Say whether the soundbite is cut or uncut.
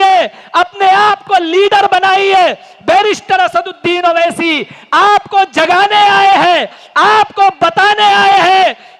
uncut